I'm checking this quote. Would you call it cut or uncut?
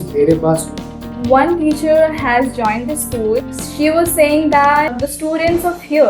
cut